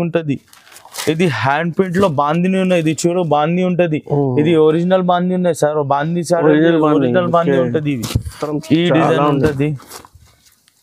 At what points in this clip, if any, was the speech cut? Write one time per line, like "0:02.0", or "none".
0:08.5